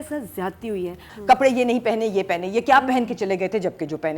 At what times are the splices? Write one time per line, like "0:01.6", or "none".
0:01.1